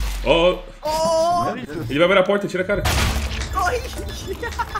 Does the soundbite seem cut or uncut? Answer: uncut